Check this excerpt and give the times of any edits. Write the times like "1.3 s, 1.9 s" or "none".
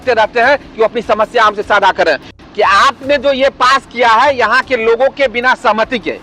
2.3 s